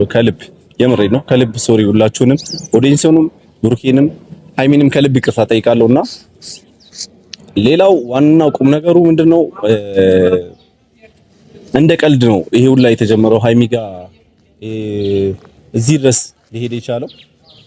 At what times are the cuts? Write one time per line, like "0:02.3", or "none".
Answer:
none